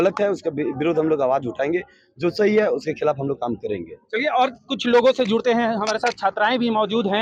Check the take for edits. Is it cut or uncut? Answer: uncut